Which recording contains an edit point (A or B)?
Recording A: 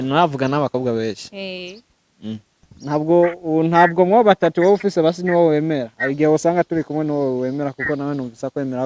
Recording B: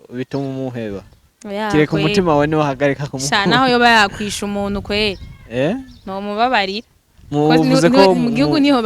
A